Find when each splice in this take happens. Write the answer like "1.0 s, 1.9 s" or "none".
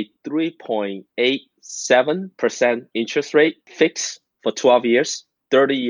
1.0 s, 2.3 s, 3.6 s